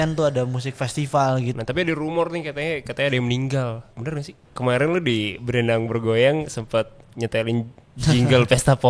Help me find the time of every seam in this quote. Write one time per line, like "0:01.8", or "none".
0:01.5
0:04.4